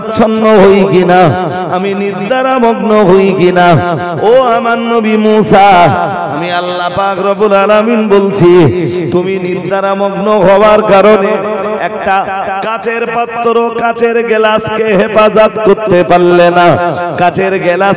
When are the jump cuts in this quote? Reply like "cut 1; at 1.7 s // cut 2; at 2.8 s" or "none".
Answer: none